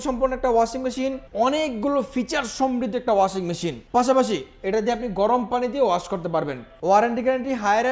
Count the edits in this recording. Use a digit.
3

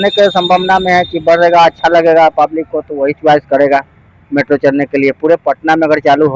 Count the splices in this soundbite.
0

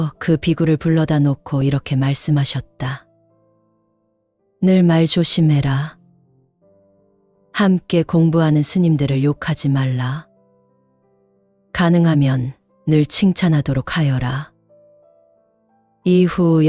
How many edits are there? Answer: 4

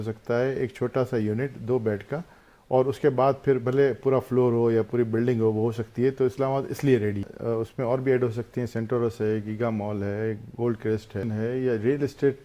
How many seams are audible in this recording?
2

